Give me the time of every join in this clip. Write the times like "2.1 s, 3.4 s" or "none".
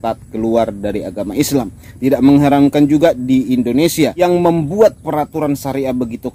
1.8 s, 4.2 s